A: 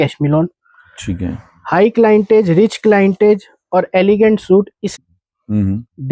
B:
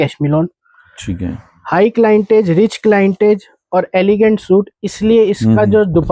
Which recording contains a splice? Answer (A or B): A